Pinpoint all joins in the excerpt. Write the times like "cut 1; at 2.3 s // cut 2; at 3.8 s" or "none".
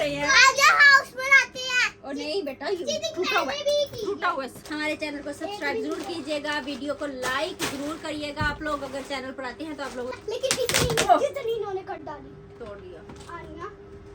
cut 1; at 4.6 s // cut 2; at 10.2 s